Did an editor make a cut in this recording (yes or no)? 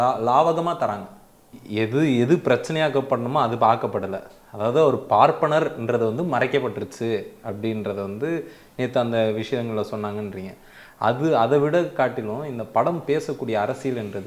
yes